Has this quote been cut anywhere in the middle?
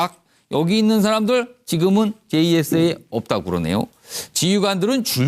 yes; 1 cut; at 2.8 s

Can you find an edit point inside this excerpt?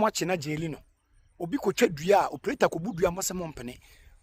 no; 0 cuts

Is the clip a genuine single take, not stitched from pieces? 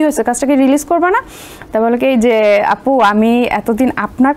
yes; 0 cuts

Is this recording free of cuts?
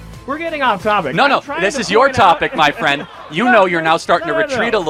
yes; 0 cuts

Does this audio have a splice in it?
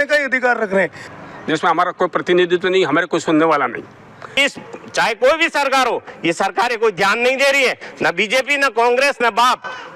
yes; 2 cuts; at 1.0 s, 4.4 s

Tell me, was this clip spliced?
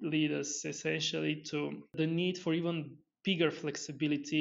yes; 1 cut; at 1.9 s

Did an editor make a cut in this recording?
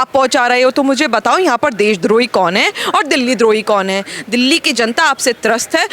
no; 0 cuts

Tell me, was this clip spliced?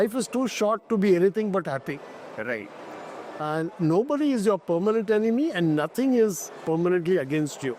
no; 0 cuts

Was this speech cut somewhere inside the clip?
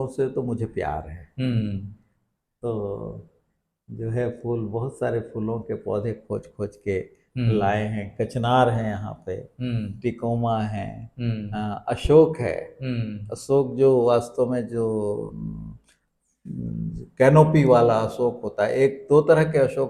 no; 0 cuts

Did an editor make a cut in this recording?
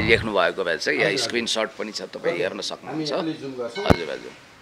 no; 0 cuts

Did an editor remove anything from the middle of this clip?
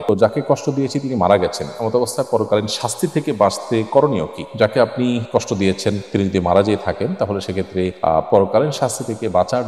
no; 0 cuts

